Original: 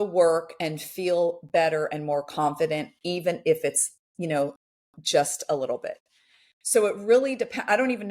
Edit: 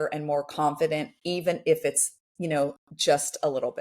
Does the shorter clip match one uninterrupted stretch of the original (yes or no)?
no